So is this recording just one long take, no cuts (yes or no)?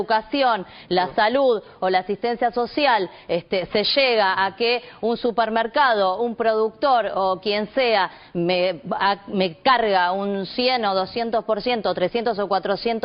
yes